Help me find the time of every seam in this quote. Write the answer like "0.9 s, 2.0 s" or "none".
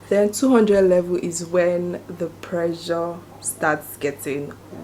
none